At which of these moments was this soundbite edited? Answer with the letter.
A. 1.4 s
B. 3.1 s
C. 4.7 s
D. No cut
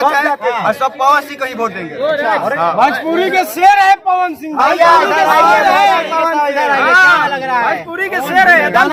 D